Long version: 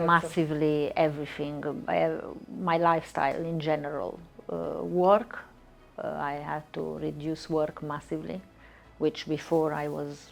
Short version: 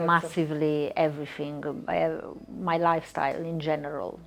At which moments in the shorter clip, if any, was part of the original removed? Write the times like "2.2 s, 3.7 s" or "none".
none